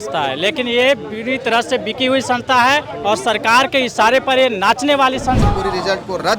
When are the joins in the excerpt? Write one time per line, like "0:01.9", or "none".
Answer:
0:05.4